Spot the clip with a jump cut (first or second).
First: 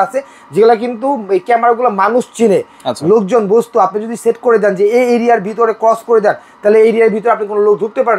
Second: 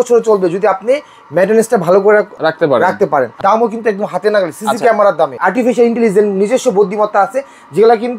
second